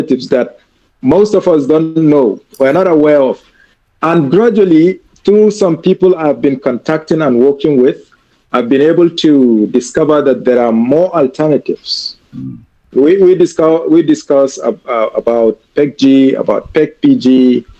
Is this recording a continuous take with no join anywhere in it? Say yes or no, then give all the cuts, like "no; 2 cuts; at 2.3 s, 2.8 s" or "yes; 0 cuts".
yes; 0 cuts